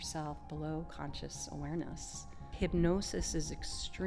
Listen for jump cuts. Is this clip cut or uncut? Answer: cut